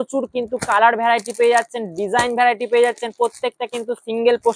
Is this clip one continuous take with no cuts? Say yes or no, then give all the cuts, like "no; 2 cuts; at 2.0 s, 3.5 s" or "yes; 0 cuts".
yes; 0 cuts